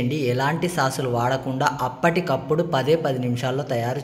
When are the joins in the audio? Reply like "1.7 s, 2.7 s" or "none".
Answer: none